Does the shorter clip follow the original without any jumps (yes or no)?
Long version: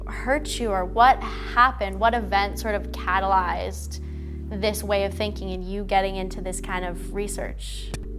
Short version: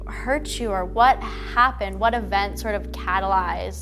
yes